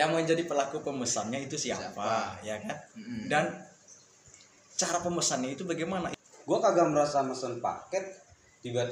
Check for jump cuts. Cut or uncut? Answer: cut